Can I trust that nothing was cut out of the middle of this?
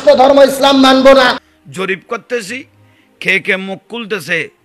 no; 1 cut; at 1.4 s

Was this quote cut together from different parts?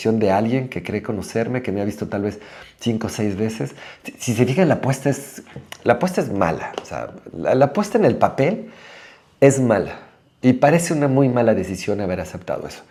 no; 0 cuts

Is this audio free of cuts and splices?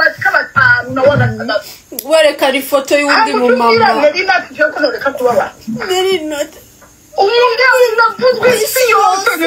no; 1 cut; at 1.2 s

